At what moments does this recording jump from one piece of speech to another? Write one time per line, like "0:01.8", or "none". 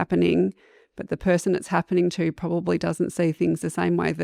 none